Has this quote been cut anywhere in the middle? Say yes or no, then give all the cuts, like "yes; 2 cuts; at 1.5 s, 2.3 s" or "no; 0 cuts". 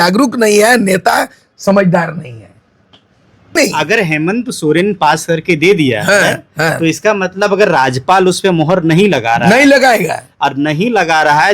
yes; 1 cut; at 3.6 s